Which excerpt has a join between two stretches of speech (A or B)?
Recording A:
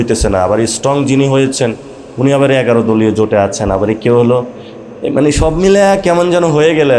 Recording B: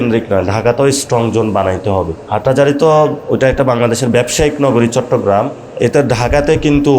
B